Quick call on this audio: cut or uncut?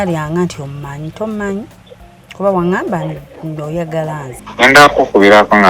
cut